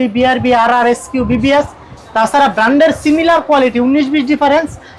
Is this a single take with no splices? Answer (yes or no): yes